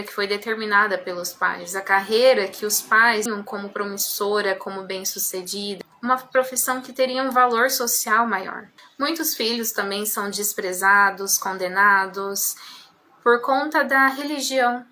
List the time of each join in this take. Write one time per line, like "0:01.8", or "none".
0:03.3